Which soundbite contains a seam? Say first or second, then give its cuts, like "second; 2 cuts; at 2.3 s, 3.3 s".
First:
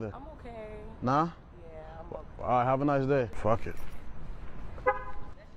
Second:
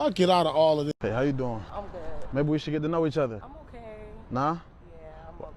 second; 1 cut; at 0.9 s